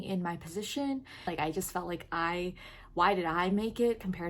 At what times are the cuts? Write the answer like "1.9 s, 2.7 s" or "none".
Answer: 1.3 s